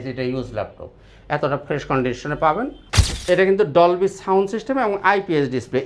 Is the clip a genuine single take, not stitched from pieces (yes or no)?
no